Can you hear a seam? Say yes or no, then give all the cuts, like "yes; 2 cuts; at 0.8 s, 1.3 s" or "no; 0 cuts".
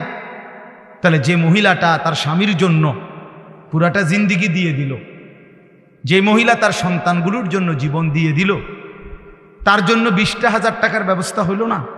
no; 0 cuts